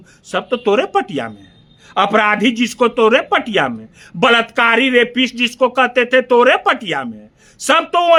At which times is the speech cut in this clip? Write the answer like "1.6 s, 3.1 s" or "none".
none